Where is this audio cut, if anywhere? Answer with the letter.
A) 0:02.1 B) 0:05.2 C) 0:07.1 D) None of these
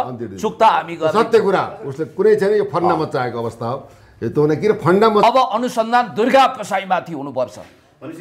B